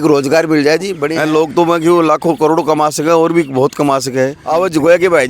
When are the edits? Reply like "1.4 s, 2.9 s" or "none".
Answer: 1.0 s, 4.4 s